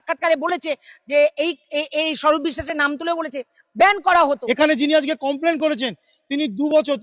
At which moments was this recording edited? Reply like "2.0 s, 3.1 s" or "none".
4.3 s